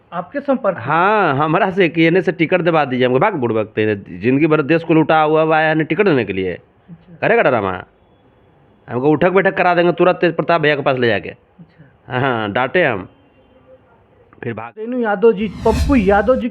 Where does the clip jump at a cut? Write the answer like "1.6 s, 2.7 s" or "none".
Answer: 14.9 s